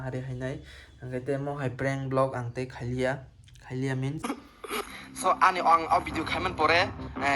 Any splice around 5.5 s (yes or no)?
no